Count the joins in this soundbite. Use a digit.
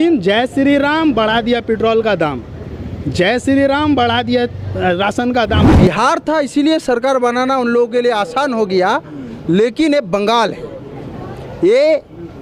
1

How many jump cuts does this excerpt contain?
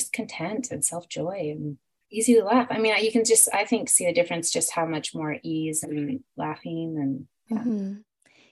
1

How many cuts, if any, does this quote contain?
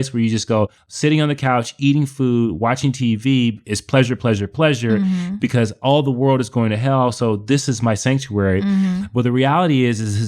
1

